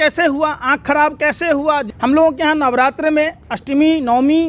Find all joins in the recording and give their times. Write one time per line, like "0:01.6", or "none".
0:01.8

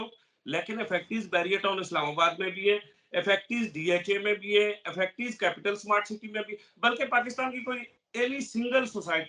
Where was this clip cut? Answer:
none

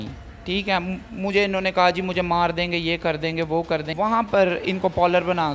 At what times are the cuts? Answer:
0:03.9

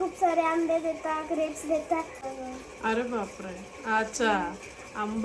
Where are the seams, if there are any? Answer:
0:02.2

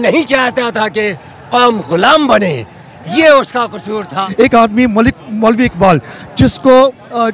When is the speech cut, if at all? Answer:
0:04.2

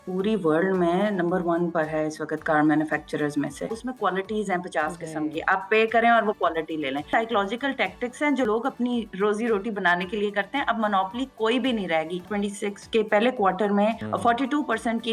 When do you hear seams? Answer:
0:03.8
0:07.1
0:08.5
0:12.3
0:14.0

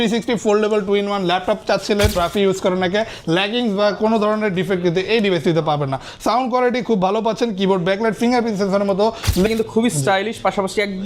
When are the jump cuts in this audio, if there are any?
0:02.2
0:09.5

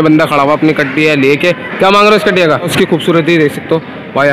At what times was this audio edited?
0:02.7

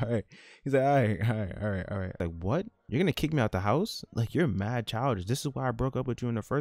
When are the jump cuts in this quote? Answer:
0:02.2

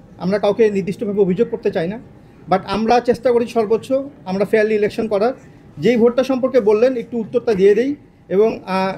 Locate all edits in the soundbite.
none

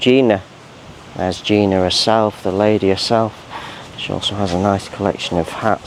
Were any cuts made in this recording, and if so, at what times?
none

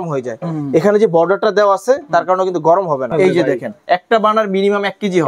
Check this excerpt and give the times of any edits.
0:03.1

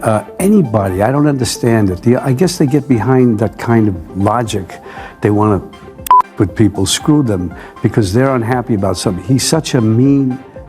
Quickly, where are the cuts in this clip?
none

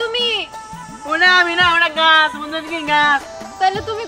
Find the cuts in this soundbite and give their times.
none

